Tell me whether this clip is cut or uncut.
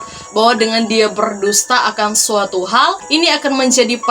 cut